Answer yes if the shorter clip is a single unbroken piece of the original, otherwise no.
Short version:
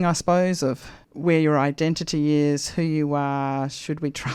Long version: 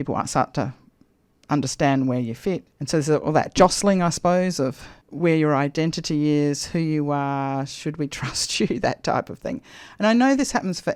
yes